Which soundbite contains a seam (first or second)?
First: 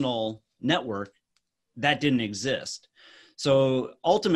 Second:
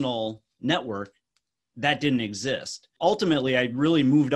second